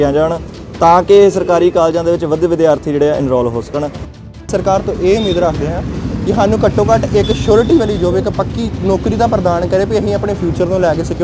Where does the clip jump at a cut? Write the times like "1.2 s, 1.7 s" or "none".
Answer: 4.1 s